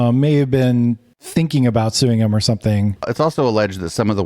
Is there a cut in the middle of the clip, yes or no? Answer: yes